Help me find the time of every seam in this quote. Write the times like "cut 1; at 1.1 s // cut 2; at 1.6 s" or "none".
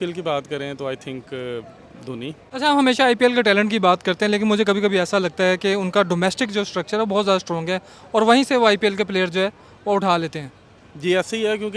cut 1; at 2.4 s